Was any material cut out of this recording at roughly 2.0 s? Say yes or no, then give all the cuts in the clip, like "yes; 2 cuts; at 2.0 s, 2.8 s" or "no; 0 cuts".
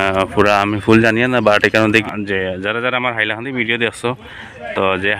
yes; 1 cut; at 2.0 s